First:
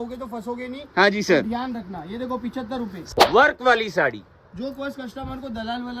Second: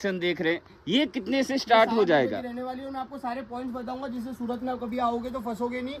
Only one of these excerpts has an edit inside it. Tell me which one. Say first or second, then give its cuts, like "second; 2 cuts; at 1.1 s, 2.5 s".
first; 1 cut; at 3.0 s